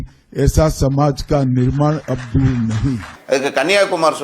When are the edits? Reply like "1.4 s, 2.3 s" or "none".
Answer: 3.1 s